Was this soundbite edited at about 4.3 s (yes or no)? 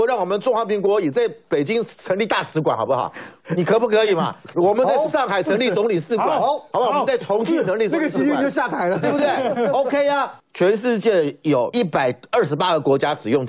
no